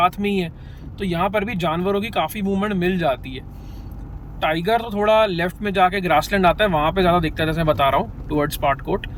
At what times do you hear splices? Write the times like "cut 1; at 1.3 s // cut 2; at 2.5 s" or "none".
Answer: none